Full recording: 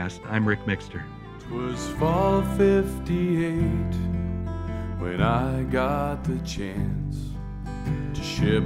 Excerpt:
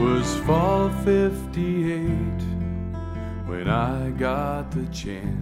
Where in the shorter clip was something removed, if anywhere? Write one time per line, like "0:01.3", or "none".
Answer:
none